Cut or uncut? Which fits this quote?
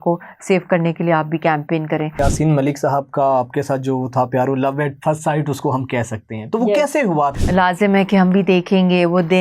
cut